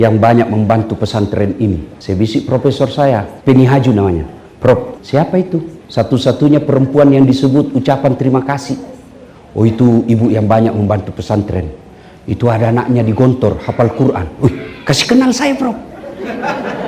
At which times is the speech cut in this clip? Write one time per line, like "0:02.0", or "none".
0:01.9
0:03.3
0:05.0
0:05.8